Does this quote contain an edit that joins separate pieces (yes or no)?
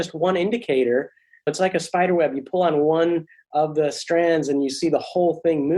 yes